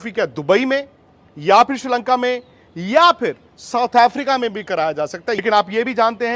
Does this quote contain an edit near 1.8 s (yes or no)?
no